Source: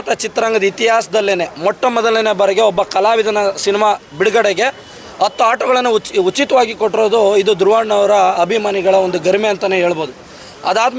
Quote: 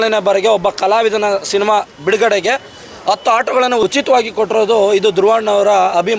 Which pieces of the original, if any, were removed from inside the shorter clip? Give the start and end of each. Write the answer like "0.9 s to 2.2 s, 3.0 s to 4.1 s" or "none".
6.0 s to 6.3 s